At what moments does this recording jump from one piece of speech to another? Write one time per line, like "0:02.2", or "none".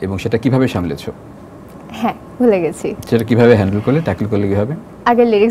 none